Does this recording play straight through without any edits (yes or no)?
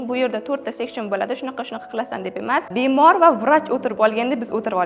no